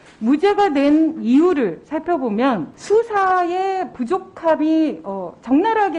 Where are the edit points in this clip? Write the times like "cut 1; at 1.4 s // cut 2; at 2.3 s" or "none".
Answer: cut 1; at 2.7 s